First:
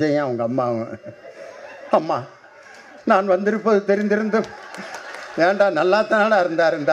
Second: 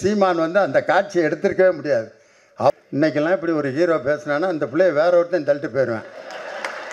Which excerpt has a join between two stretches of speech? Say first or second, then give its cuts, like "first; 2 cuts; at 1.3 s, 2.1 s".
second; 1 cut; at 2.7 s